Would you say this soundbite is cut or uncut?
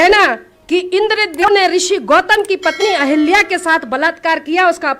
cut